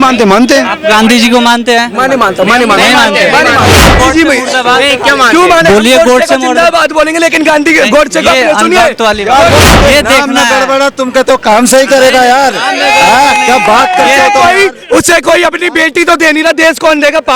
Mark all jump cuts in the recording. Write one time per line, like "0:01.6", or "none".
0:03.7
0:09.7